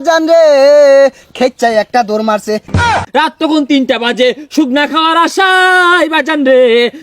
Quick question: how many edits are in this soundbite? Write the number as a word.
one